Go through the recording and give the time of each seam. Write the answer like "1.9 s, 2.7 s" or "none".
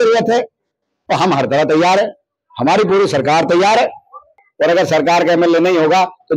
4.4 s